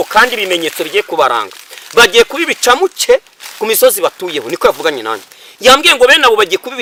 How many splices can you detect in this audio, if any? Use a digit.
0